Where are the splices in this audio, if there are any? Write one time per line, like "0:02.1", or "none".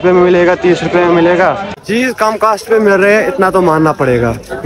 0:01.8